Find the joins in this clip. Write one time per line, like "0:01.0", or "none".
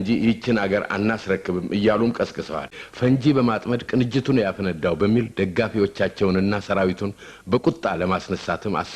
0:02.7